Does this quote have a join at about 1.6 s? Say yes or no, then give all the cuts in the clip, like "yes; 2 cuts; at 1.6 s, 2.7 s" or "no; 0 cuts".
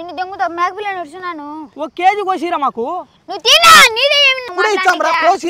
no; 1 cut; at 4.5 s